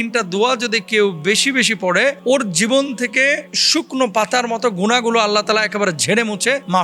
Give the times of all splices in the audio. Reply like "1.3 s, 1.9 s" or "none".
3.5 s